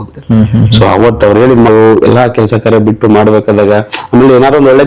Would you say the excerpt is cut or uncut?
cut